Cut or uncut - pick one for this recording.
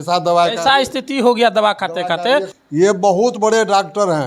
cut